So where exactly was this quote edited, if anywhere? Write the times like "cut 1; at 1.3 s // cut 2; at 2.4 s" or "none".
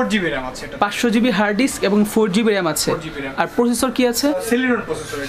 none